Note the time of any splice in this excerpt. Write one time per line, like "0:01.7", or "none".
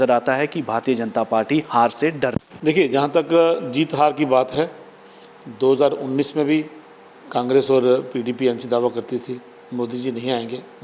0:02.5